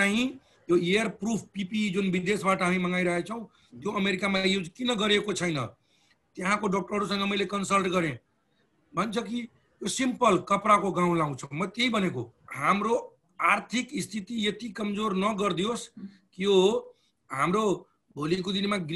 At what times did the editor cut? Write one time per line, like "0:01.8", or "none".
0:12.5